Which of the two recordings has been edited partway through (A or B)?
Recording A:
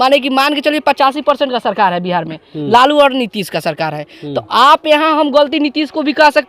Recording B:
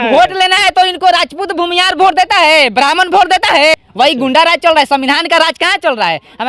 B